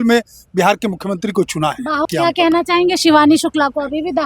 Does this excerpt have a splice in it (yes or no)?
yes